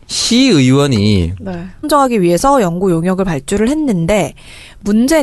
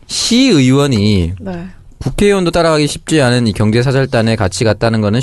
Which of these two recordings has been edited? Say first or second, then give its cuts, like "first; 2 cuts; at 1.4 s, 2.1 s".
second; 1 cut; at 1.9 s